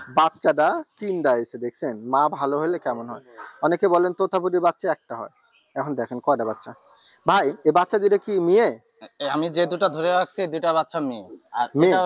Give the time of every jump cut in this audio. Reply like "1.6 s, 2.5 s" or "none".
none